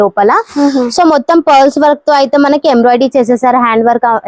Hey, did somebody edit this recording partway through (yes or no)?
no